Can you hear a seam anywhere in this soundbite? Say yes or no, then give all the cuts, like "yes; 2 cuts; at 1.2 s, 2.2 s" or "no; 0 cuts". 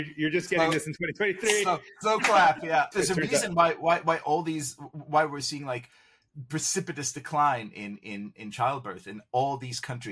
yes; 1 cut; at 2.9 s